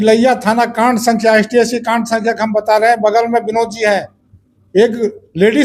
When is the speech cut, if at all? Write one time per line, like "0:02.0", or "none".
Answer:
none